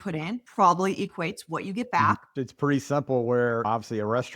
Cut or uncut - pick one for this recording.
cut